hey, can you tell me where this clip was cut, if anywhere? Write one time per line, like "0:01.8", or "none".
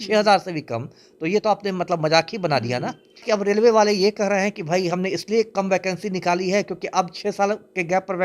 0:03.2